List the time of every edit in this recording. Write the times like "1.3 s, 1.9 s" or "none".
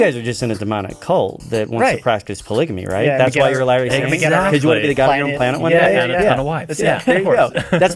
none